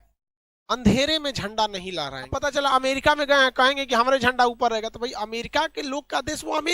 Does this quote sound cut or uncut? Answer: cut